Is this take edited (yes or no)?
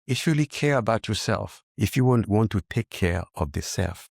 yes